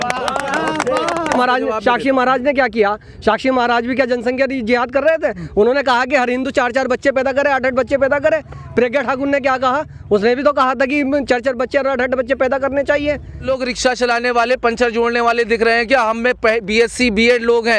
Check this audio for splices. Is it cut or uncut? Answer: cut